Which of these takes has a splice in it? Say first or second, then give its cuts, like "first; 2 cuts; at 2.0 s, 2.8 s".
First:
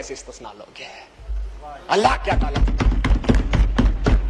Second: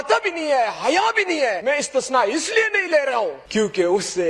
second; 2 cuts; at 1.6 s, 3.4 s